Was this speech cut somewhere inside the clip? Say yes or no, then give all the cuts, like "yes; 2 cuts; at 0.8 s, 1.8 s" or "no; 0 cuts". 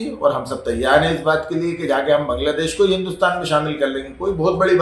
no; 0 cuts